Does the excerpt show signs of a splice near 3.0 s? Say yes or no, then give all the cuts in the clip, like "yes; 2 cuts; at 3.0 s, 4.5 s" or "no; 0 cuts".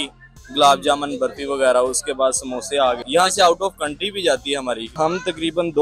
yes; 2 cuts; at 3.0 s, 4.9 s